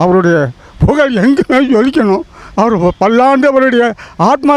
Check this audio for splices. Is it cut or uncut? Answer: uncut